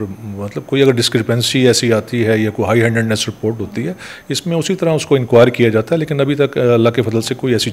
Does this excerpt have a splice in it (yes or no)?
no